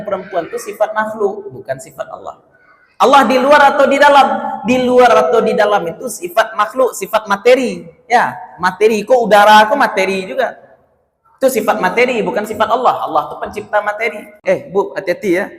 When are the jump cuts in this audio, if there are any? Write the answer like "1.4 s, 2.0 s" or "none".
14.3 s